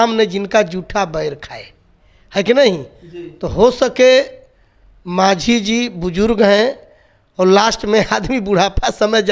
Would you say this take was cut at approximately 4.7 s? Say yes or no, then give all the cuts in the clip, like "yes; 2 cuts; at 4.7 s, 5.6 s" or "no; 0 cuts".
no; 0 cuts